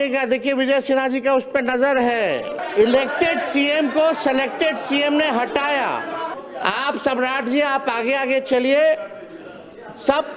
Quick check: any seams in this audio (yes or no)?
yes